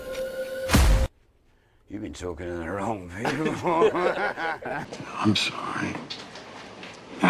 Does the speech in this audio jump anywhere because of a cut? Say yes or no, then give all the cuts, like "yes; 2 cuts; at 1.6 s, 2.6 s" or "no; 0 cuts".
yes; 1 cut; at 4.9 s